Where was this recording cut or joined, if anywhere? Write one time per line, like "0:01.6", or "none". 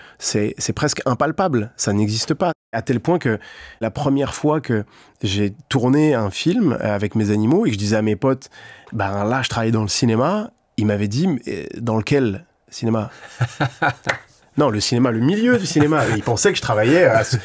0:02.7
0:03.8